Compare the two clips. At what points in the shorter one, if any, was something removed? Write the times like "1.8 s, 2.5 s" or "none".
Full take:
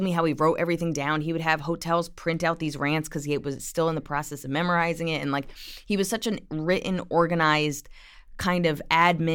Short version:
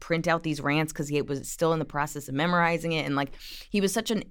none